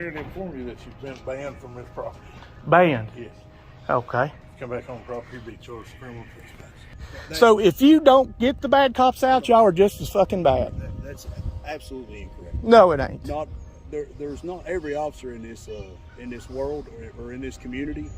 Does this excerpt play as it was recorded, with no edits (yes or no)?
no